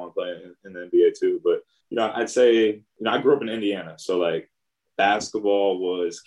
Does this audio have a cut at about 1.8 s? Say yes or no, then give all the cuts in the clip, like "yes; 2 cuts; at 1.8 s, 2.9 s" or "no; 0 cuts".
yes; 2 cuts; at 1.8 s, 2.9 s